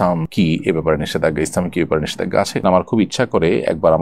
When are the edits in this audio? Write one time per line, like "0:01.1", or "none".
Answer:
0:02.6